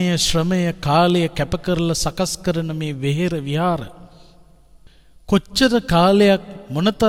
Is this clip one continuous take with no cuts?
yes; 0 cuts

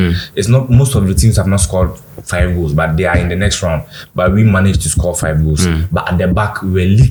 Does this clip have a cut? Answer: no; 0 cuts

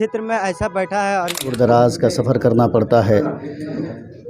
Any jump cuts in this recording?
yes; 1 cut; at 1.5 s

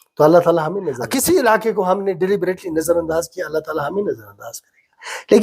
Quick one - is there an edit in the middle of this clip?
yes; 1 cut; at 1.0 s

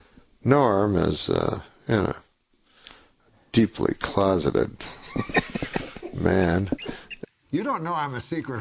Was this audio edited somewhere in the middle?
yes; 1 cut; at 7.5 s

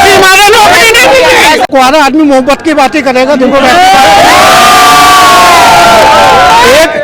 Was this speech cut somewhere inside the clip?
yes; 1 cut; at 1.7 s

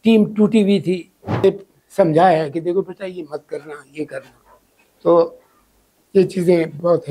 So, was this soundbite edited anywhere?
yes; 1 cut; at 1.4 s

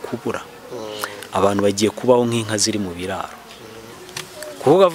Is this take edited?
no; 0 cuts

